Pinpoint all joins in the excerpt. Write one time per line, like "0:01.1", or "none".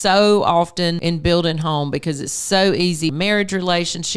0:01.0
0:03.1